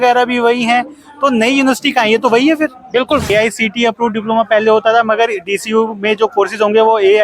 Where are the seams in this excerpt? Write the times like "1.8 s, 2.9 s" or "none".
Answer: 3.3 s